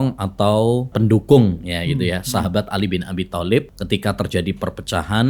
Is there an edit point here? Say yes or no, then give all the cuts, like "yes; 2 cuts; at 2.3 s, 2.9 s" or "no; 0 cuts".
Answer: yes; 2 cuts; at 0.9 s, 3.8 s